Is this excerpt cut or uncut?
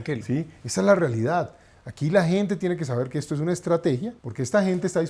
cut